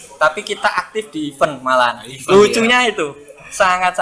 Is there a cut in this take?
no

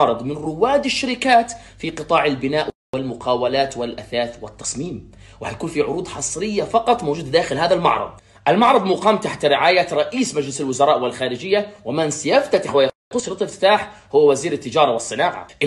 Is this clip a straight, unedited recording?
yes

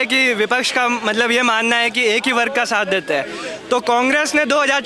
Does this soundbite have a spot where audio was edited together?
no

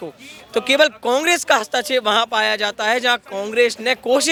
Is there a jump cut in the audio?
no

